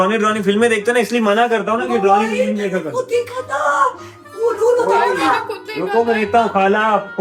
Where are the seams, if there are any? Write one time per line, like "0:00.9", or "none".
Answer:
none

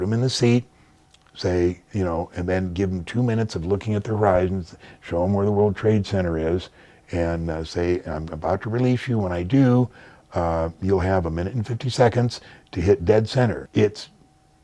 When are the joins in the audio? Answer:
0:13.6

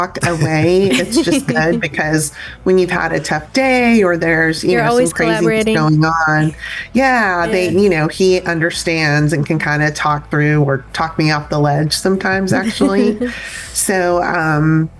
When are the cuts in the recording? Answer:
none

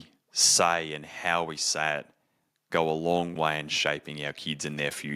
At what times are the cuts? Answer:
0:03.3

